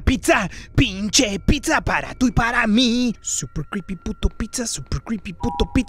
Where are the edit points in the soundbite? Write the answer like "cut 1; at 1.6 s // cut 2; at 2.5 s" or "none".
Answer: cut 1; at 3.2 s